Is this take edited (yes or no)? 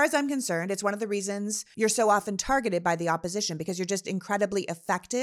yes